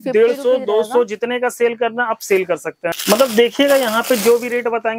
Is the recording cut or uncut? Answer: cut